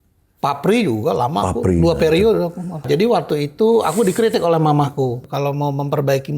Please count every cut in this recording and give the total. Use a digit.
2